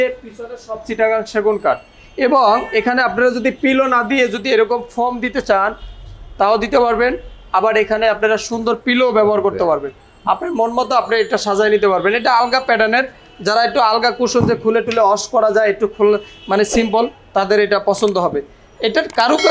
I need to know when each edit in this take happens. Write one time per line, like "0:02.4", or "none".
none

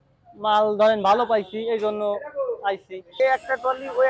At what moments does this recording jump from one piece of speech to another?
0:03.1

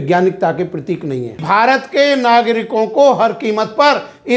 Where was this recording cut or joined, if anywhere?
0:01.4

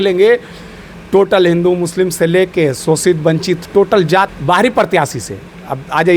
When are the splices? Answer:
0:04.4

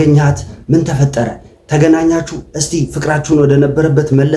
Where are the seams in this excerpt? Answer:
none

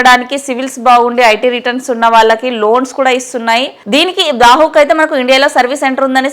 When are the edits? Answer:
0:03.8

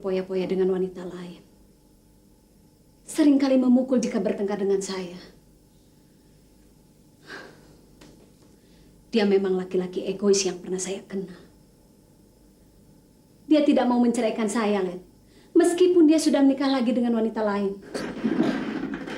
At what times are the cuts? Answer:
0:17.9

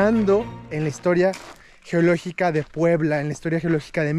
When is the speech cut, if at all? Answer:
none

